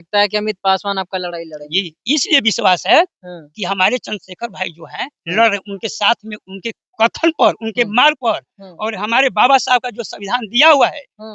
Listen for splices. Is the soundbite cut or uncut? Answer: uncut